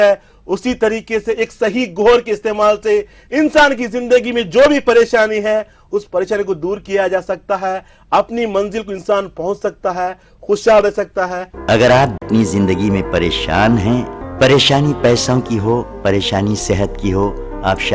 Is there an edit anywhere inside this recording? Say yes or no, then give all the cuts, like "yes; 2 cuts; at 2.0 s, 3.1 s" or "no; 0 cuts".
yes; 2 cuts; at 11.4 s, 12.2 s